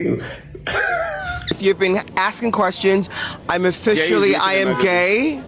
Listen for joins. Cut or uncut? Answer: cut